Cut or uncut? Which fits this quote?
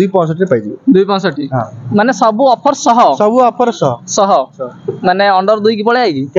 cut